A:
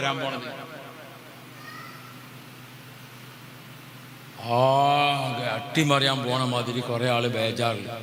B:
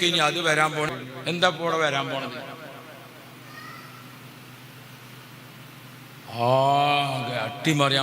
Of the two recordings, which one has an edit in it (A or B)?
B